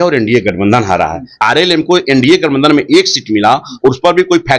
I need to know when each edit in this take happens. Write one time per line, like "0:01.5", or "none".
0:01.3